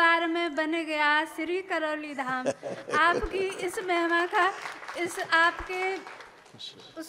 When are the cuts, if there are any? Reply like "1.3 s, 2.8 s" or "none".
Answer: none